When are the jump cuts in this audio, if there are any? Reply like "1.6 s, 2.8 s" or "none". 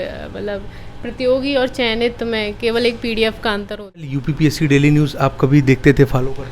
4.1 s